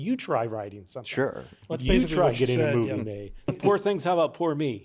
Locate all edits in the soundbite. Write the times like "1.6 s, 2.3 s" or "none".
3.5 s